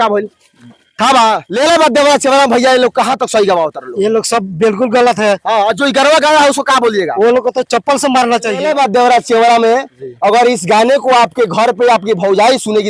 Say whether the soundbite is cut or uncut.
cut